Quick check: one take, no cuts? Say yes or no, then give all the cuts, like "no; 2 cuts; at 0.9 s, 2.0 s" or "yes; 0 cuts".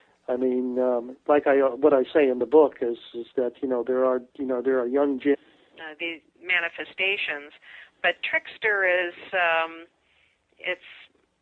yes; 0 cuts